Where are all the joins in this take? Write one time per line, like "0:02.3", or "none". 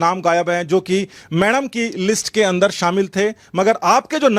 none